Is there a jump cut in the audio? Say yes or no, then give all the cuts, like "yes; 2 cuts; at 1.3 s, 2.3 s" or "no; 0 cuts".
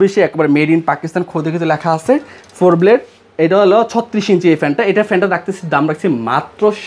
no; 0 cuts